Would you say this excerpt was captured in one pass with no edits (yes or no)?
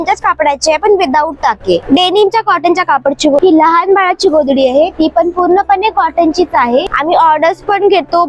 no